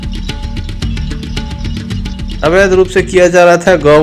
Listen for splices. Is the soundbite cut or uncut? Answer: cut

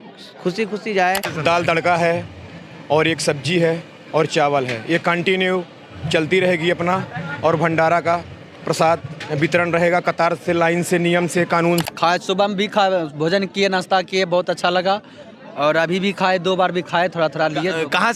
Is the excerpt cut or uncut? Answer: cut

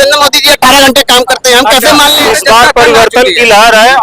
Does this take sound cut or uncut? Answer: cut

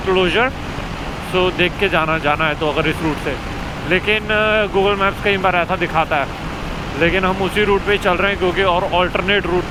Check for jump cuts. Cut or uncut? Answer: uncut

